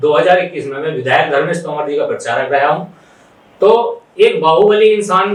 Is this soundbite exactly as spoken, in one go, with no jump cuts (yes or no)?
yes